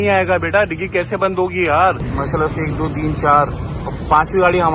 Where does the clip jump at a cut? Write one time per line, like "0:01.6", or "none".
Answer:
0:02.1